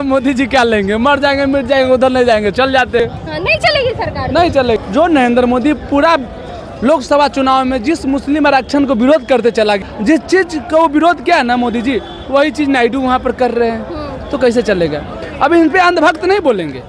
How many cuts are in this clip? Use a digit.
3